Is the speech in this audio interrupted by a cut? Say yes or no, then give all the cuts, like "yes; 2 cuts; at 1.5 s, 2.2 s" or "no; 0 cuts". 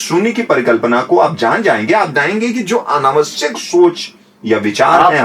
no; 0 cuts